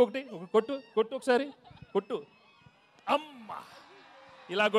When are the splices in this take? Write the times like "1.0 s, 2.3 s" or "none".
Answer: none

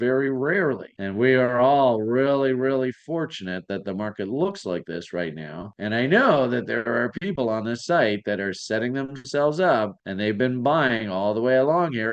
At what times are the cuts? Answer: none

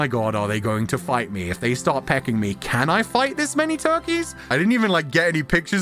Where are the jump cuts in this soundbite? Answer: 4.5 s

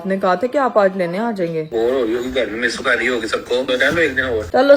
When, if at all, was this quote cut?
1.7 s, 3.9 s

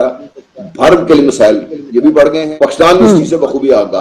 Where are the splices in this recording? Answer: 2.5 s

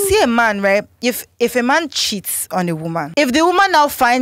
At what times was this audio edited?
3.1 s

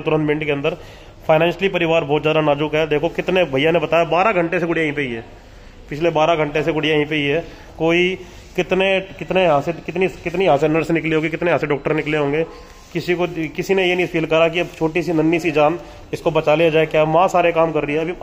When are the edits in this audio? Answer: none

